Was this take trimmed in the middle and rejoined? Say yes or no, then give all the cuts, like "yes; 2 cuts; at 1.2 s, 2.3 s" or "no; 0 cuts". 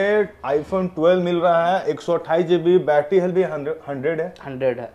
no; 0 cuts